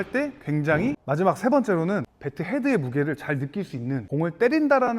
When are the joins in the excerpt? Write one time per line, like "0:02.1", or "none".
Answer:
0:01.0
0:02.1
0:04.0